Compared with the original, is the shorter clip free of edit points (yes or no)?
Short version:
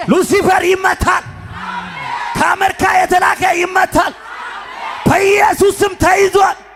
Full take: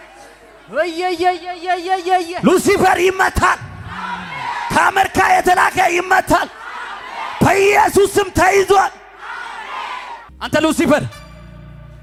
yes